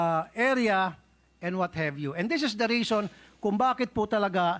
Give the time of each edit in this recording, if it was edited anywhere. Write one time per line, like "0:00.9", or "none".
none